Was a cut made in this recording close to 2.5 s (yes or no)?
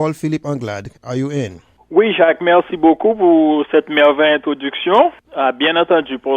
no